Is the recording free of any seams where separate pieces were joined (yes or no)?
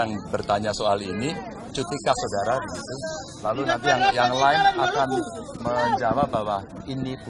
yes